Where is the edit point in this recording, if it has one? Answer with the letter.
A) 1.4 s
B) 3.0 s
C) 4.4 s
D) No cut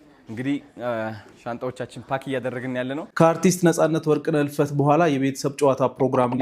B